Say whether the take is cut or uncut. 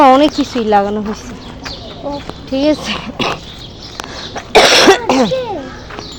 uncut